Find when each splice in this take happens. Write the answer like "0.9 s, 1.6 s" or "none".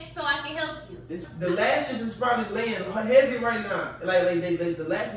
1.2 s